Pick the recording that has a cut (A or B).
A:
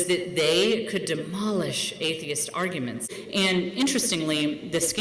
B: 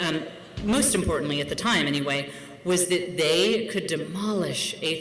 A